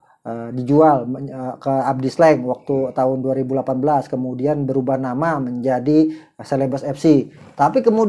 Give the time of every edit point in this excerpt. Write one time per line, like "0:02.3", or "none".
none